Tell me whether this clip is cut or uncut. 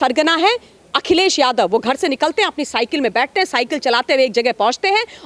uncut